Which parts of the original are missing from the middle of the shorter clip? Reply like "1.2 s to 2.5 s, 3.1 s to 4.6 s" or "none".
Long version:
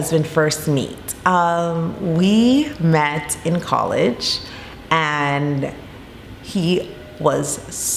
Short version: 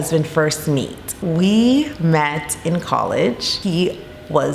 1.1 s to 1.9 s, 4.3 s to 6.4 s